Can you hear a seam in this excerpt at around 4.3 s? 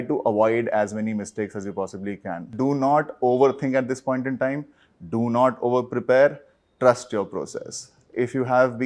no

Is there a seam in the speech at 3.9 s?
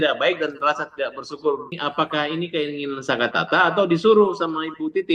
no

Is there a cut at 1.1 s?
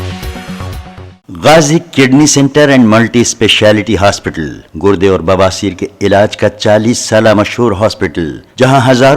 yes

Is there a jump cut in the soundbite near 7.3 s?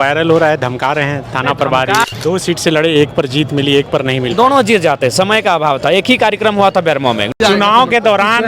yes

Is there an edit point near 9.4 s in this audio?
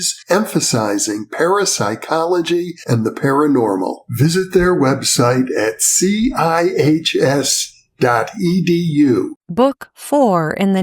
yes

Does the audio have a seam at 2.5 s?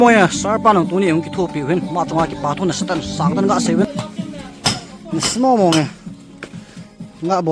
no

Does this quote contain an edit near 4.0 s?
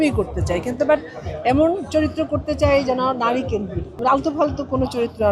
yes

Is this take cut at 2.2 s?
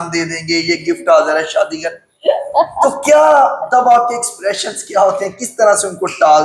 no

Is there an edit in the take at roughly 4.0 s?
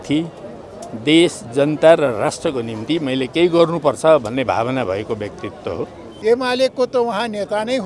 no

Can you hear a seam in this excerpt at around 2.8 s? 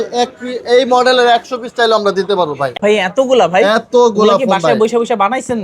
yes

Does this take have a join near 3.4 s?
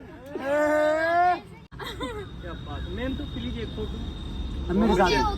no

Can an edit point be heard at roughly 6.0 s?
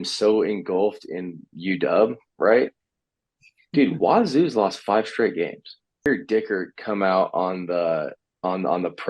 yes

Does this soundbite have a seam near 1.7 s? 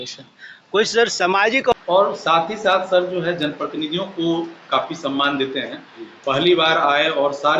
yes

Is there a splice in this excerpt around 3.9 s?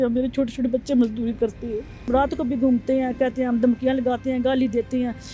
no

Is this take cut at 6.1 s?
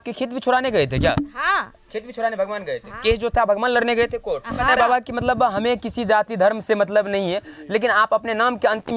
no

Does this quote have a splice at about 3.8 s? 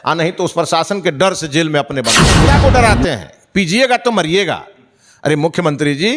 no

